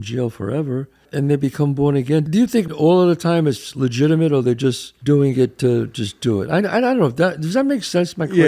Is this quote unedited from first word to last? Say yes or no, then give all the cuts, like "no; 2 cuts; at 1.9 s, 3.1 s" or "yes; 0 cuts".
no; 3 cuts; at 1.1 s, 2.7 s, 4.9 s